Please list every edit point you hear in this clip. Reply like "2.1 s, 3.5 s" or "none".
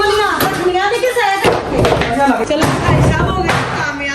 2.5 s